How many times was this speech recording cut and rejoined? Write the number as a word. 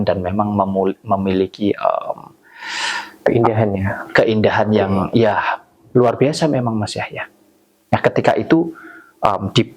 zero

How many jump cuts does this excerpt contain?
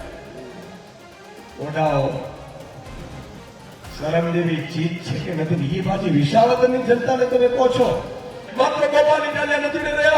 one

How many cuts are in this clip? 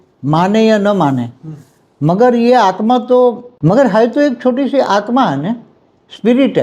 one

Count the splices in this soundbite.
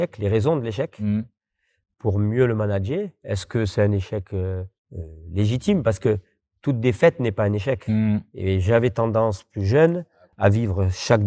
zero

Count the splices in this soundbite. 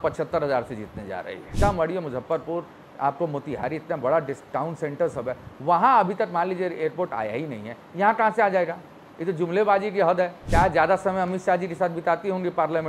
two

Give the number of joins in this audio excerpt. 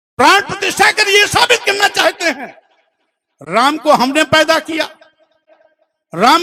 zero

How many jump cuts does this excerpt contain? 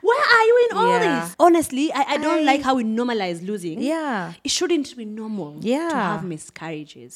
one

